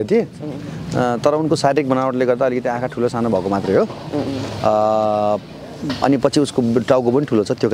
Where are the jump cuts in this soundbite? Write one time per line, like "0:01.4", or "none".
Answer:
none

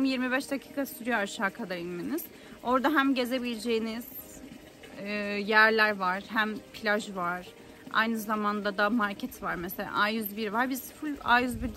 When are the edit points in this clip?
none

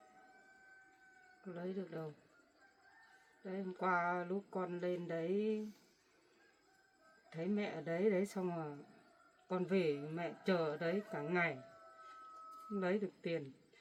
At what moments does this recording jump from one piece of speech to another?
none

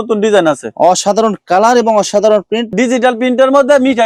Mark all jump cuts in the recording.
none

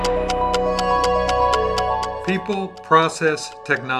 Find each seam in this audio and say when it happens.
0:02.2

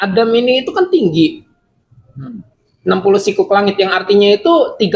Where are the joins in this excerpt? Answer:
none

